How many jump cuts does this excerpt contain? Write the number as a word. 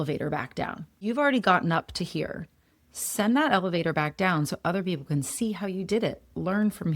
one